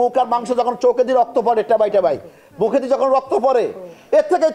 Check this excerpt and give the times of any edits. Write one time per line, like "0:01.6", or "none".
none